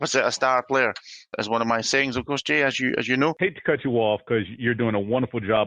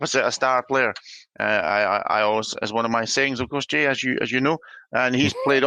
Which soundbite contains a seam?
first; 2 cuts; at 1.3 s, 3.4 s

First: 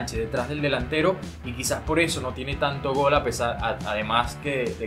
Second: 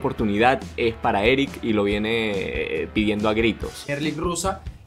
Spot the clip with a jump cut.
second; 1 cut; at 3.9 s

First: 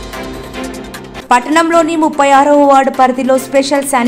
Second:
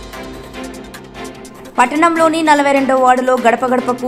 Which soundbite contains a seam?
first; 1 cut; at 1.2 s

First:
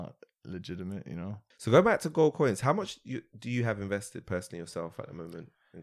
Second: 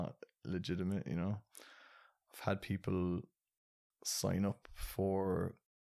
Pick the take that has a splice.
first; 1 cut; at 1.5 s

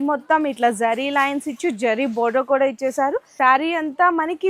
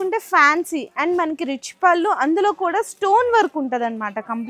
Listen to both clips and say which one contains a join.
first; 1 cut; at 3.3 s

